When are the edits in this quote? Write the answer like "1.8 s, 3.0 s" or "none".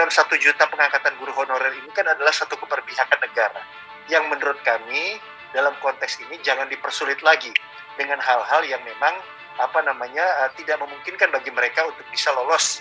none